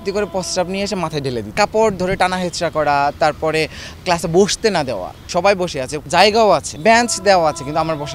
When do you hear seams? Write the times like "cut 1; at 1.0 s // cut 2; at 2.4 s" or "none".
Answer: cut 1; at 1.5 s // cut 2; at 5.1 s // cut 3; at 6.0 s // cut 4; at 6.7 s